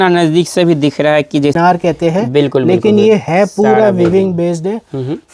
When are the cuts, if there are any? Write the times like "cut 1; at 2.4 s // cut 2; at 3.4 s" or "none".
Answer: cut 1; at 1.6 s